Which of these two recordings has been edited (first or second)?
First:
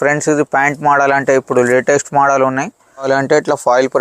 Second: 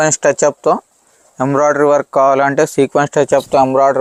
first